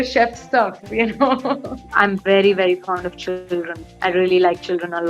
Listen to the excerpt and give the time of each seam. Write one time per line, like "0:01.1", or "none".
0:01.9